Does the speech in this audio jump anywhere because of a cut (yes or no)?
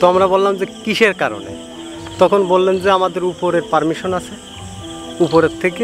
no